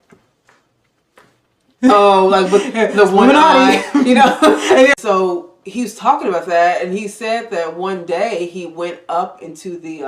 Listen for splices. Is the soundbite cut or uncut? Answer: cut